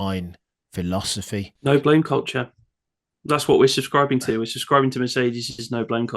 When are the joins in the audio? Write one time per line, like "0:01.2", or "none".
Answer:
0:01.5